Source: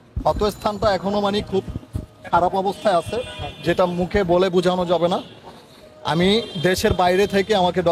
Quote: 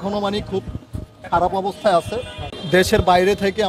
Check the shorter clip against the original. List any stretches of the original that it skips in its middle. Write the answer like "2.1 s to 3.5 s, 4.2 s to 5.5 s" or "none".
3.6 s to 6.5 s

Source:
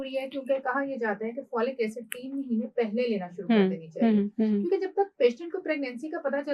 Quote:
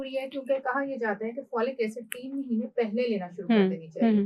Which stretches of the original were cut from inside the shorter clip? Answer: none

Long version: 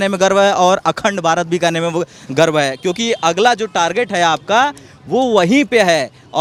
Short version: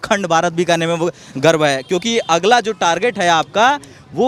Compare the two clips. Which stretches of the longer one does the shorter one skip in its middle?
none

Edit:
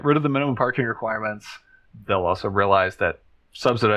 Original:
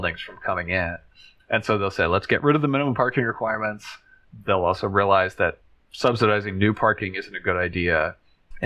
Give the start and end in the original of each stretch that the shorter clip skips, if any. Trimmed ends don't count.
none

